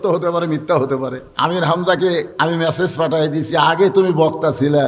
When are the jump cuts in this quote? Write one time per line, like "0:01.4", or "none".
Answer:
0:01.2
0:02.3